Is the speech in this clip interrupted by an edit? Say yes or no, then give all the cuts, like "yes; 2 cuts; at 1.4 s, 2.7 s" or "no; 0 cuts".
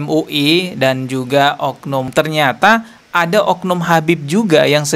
yes; 1 cut; at 2.1 s